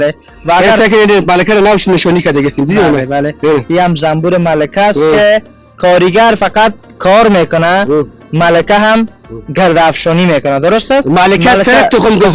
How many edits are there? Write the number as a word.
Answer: zero